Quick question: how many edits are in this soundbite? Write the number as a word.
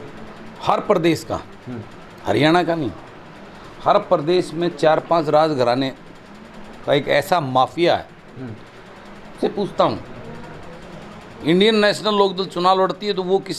one